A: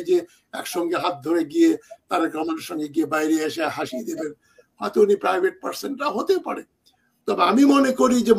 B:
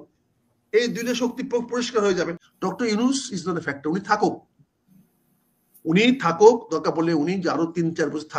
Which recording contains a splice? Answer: B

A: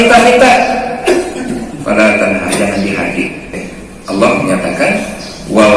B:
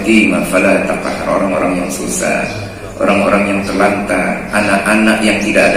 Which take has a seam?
A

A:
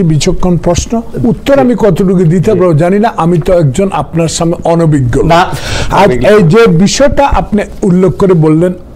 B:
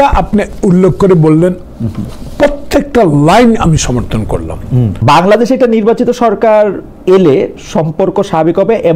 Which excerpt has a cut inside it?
B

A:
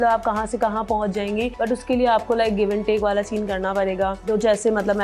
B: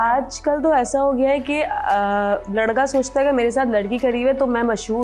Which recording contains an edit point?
A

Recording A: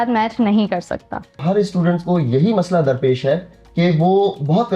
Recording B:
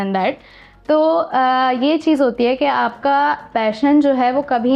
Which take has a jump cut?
A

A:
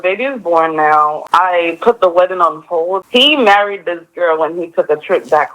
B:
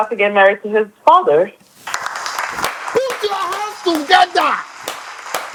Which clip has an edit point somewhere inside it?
A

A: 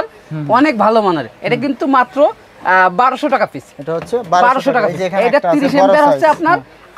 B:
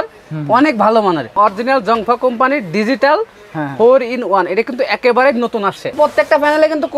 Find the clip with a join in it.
B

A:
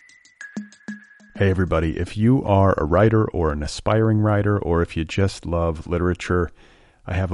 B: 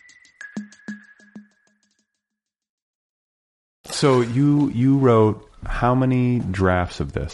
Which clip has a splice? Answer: A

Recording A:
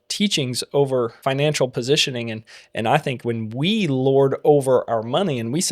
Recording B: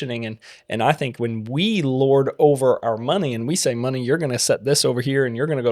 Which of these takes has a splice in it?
A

